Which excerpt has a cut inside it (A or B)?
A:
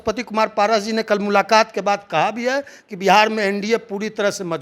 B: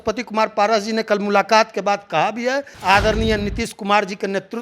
B